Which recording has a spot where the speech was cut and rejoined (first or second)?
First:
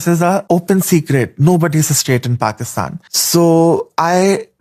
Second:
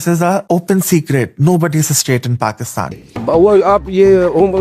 second